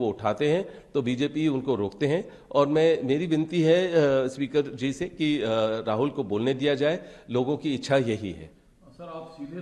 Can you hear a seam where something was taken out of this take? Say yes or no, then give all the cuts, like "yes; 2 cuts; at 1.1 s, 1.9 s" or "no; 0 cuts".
no; 0 cuts